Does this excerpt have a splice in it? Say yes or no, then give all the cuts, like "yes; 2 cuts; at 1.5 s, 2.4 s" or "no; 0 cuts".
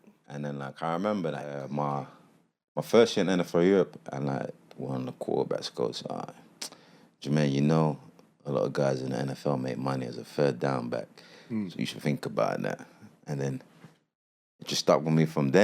yes; 1 cut; at 1.6 s